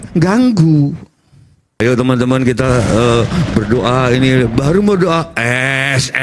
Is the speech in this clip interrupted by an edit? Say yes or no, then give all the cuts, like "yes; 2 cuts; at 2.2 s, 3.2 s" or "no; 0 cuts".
yes; 1 cut; at 1.8 s